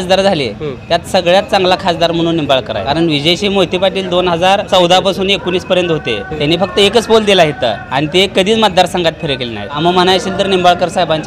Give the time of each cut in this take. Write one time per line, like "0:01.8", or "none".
0:02.8
0:04.7
0:06.3
0:07.8
0:09.8